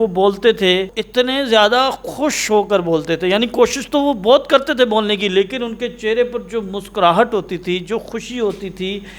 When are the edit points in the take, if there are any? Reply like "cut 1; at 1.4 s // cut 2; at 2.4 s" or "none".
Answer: cut 1; at 1.0 s